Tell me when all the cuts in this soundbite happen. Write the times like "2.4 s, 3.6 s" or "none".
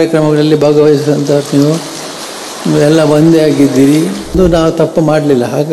4.3 s